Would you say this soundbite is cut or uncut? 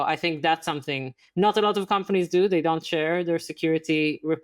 uncut